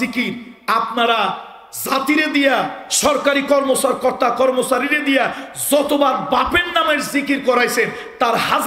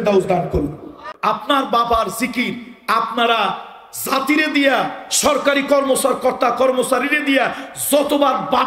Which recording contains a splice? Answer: second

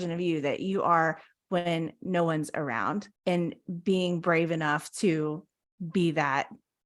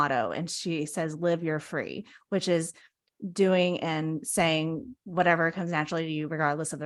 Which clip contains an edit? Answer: first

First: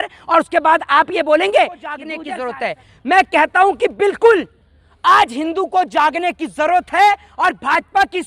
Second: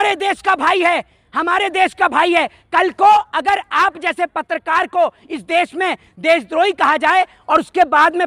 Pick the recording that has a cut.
first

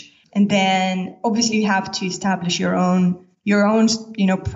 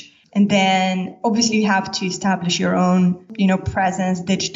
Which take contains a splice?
second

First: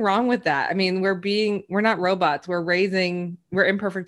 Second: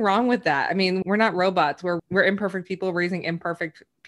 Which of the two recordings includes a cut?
second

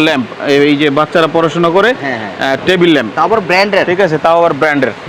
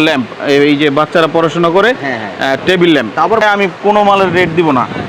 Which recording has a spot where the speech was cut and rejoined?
second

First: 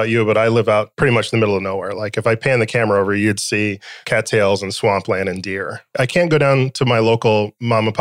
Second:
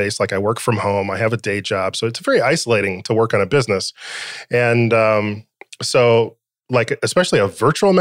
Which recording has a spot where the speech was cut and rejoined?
first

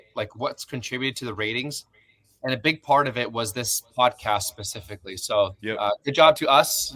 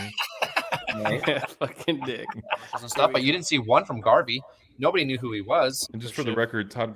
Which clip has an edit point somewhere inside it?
second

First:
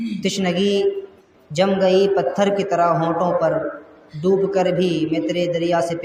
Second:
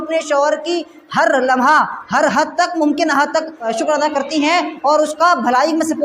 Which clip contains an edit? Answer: second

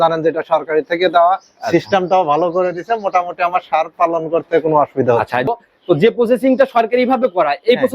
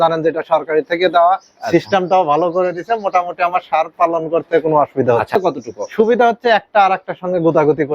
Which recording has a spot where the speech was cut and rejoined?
second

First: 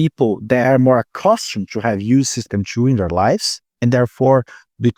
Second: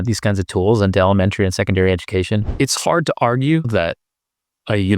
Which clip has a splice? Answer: second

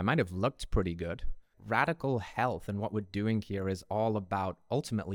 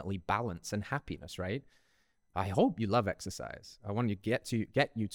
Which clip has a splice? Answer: first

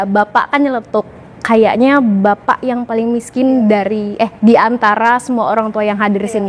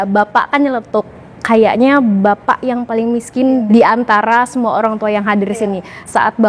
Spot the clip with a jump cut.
second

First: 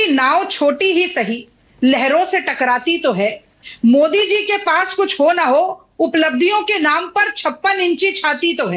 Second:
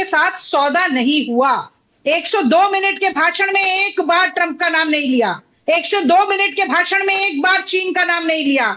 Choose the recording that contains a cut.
second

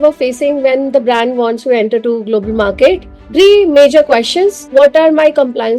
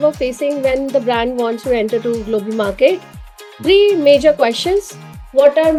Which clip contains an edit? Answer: first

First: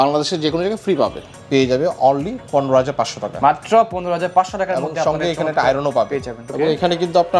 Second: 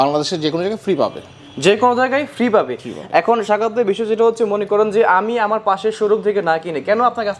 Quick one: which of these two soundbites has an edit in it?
first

